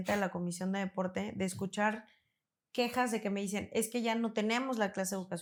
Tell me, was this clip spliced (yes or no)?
no